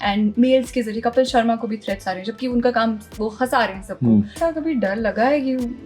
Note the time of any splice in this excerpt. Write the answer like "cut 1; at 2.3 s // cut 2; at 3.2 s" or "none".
cut 1; at 4.3 s